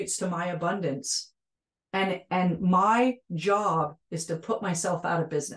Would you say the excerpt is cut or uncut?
uncut